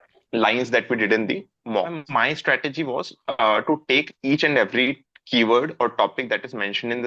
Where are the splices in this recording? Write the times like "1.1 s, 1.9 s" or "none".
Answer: 2.0 s